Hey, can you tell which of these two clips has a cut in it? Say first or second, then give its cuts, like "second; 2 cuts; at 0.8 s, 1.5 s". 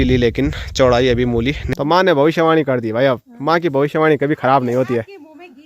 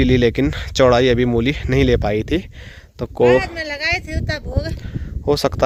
first; 1 cut; at 1.6 s